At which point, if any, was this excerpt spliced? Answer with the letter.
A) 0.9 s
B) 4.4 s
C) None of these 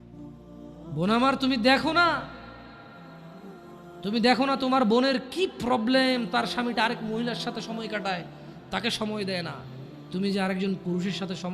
A